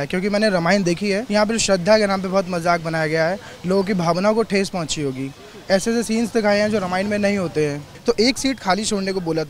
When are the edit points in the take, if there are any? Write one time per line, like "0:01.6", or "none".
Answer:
0:01.2
0:07.9